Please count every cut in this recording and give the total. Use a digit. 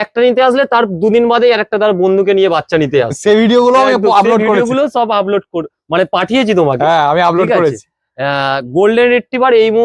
0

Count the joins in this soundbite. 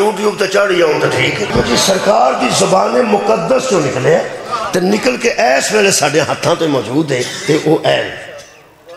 1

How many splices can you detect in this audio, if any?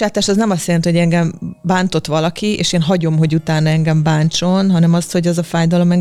0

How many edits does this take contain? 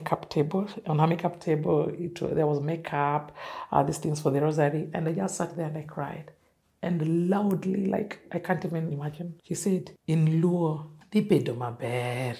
0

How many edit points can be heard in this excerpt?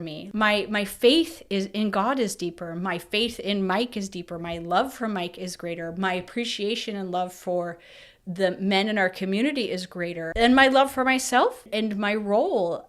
2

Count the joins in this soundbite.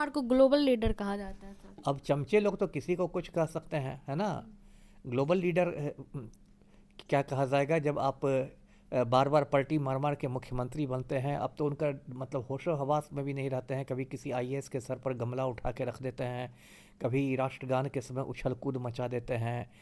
0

